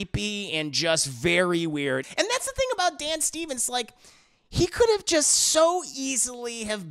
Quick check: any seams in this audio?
yes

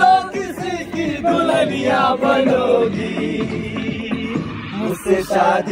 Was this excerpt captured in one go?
yes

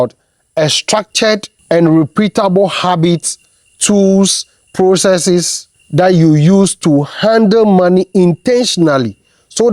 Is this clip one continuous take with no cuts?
yes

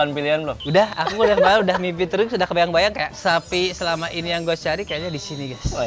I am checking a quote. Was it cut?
no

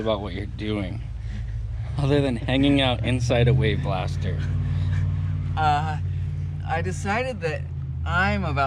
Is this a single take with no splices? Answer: yes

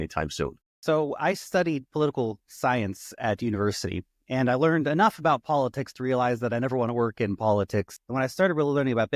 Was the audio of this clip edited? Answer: yes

